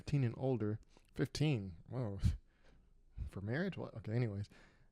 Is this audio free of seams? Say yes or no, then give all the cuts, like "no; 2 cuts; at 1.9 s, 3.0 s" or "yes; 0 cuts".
yes; 0 cuts